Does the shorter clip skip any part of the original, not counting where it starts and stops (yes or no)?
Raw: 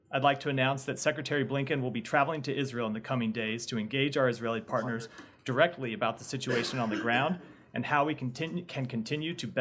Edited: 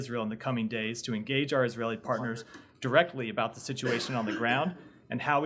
no